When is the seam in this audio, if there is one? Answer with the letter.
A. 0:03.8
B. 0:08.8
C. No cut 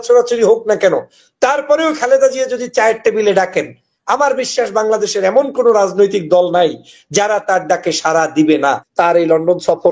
B